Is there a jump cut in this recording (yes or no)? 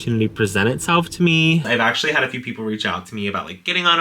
yes